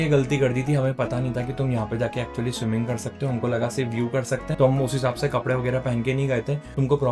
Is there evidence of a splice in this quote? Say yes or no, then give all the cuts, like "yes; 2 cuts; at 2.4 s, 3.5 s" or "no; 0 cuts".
no; 0 cuts